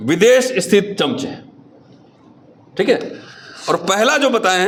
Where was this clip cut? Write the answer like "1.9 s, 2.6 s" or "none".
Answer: none